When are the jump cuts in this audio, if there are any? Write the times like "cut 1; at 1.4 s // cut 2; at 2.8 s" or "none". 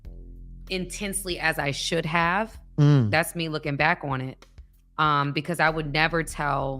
cut 1; at 2.6 s